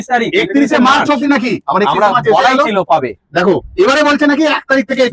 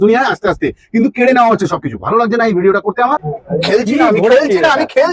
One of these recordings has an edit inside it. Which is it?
second; 1 cut; at 3.3 s

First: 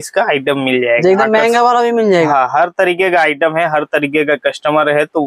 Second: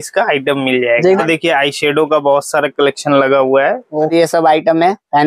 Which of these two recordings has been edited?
second; 2 cuts; at 1.2 s, 4.1 s

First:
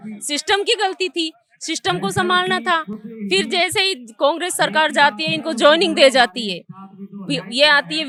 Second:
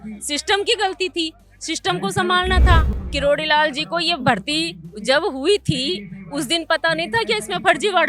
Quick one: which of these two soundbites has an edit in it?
second; 1 cut; at 3.0 s

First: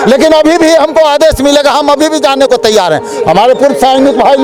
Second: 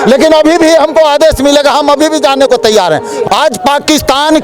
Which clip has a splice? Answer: second; 1 cut; at 3.2 s

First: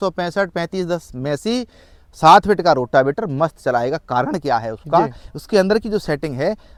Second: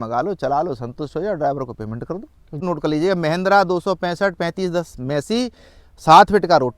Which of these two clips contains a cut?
second; 1 cut; at 2.6 s

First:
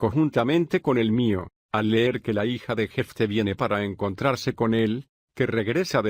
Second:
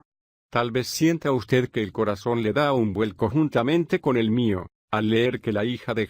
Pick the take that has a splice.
second; 1 cut; at 1.2 s

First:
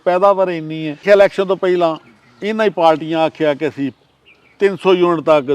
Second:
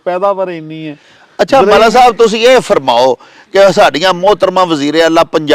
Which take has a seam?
first; 1 cut; at 1.0 s

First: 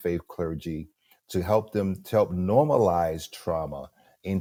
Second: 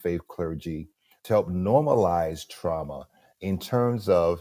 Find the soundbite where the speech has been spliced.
second; 1 cut; at 1.2 s

